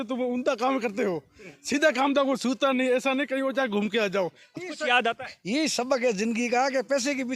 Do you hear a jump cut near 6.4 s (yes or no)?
no